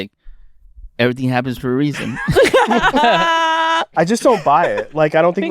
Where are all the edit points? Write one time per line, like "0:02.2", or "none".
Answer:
0:03.9